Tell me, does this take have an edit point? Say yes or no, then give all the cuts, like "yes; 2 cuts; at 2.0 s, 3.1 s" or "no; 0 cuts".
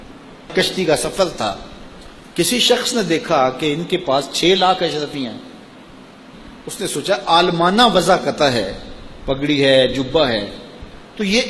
no; 0 cuts